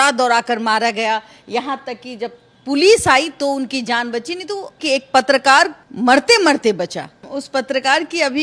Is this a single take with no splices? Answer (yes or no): no